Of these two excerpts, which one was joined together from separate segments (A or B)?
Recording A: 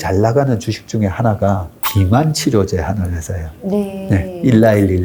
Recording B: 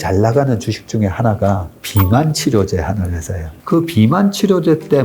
B